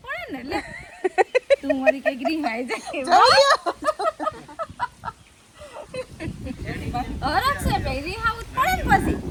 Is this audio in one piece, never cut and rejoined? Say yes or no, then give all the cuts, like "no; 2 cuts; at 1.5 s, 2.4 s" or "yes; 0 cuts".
yes; 0 cuts